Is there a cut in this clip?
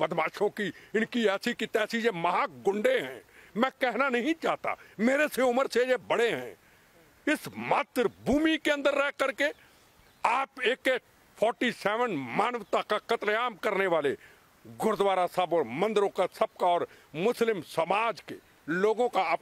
no; 0 cuts

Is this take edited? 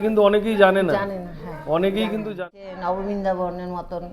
yes; 1 cut; at 2.4 s

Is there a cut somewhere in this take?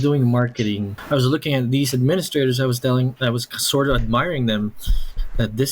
yes; 1 cut; at 0.9 s

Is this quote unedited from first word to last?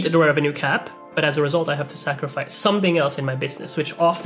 yes; 0 cuts

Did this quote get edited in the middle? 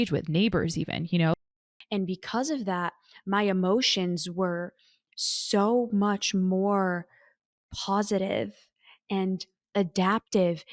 yes; 1 cut; at 1.4 s

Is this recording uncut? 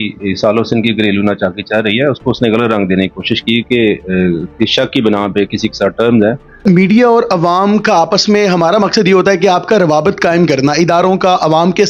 no; 1 cut; at 6.6 s

